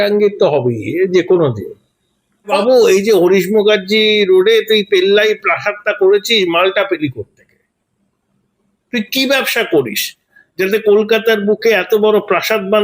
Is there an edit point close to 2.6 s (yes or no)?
yes